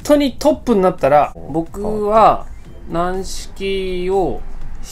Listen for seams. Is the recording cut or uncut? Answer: cut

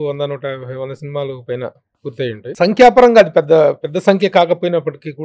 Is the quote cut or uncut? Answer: cut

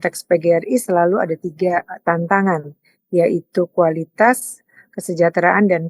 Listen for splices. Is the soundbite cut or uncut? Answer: uncut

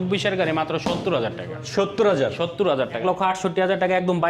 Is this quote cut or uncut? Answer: cut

